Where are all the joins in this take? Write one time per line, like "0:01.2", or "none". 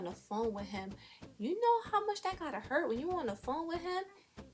0:01.3